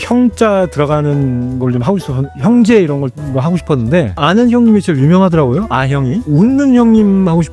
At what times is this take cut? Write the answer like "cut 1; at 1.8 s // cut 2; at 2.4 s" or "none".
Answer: cut 1; at 3.2 s // cut 2; at 4.2 s // cut 3; at 6.2 s